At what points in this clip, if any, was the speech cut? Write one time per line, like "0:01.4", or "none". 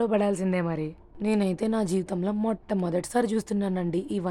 0:01.0